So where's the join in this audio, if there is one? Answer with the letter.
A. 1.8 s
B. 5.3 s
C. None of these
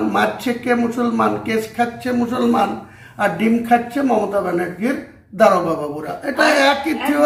C